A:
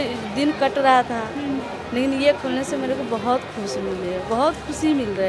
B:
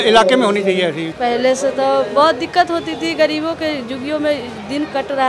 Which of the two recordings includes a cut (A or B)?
B